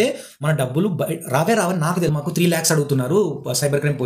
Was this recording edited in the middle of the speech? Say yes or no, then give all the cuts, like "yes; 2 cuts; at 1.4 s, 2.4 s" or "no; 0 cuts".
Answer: yes; 1 cut; at 2.1 s